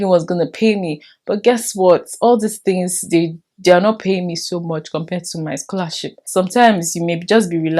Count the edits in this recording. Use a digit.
1